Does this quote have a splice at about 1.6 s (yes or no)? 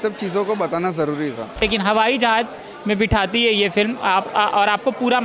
yes